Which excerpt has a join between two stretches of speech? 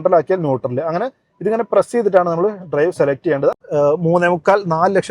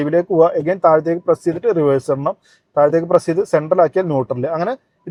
first; 1 cut; at 3.6 s

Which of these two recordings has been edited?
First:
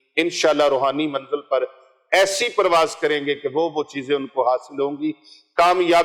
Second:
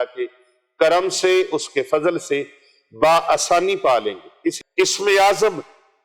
second; 1 cut; at 4.6 s

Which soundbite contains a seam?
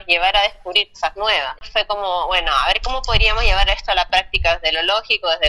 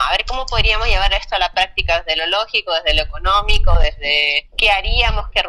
first; 1 cut; at 1.6 s

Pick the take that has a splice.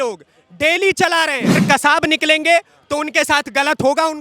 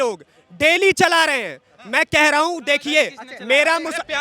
first; 1 cut; at 1.6 s

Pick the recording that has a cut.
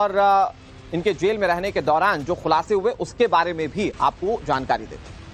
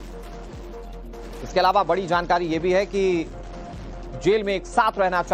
second; 1 cut; at 1.3 s

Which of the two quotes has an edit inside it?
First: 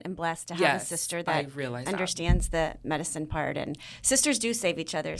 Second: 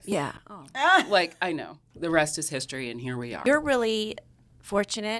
second; 2 cuts; at 1.9 s, 3.4 s

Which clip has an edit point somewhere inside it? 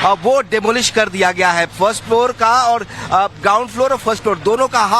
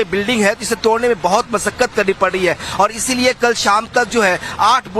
first; 1 cut; at 3.2 s

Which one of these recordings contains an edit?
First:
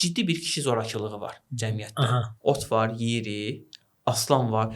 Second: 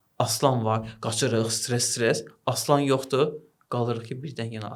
first; 1 cut; at 2.3 s

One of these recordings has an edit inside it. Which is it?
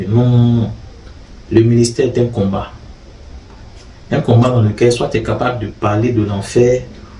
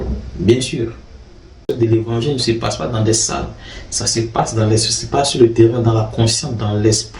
second; 1 cut; at 1.6 s

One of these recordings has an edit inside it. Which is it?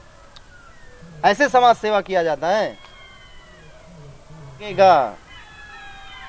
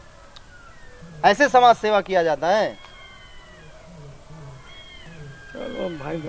first; 1 cut; at 4.7 s

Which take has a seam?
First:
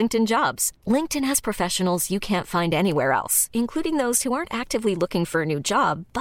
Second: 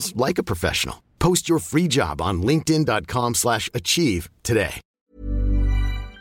second; 1 cut; at 4.8 s

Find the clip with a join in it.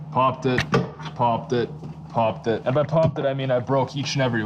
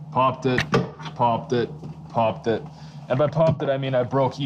first; 1 cut; at 2.6 s

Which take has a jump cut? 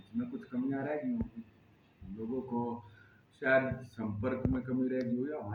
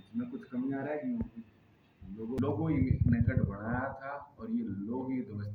second; 1 cut; at 2.4 s

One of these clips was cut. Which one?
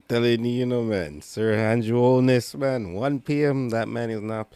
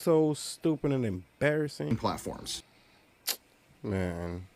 second; 1 cut; at 1.9 s

